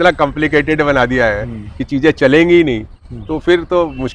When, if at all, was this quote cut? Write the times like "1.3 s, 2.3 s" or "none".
none